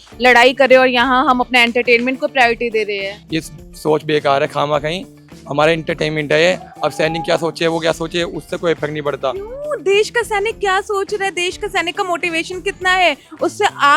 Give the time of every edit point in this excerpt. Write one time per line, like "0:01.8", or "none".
0:03.2